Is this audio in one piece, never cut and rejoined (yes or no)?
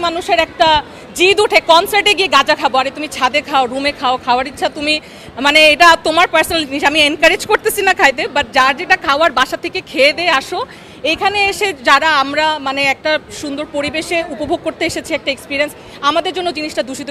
yes